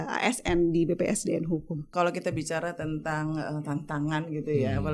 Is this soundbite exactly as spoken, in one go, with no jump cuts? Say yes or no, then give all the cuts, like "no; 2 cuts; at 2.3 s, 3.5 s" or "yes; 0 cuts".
no; 1 cut; at 1.9 s